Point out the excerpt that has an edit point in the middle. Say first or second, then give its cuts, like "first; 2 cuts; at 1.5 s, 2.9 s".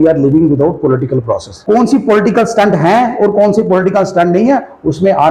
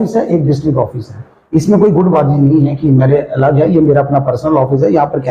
first; 1 cut; at 1.5 s